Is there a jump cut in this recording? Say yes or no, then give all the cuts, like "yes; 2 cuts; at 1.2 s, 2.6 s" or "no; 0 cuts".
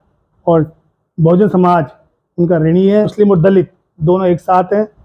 yes; 1 cut; at 3.1 s